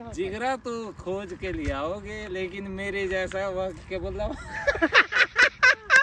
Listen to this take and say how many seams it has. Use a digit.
0